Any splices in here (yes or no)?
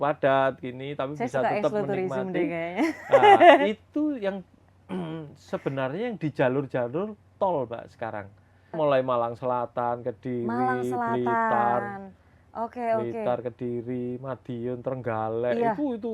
yes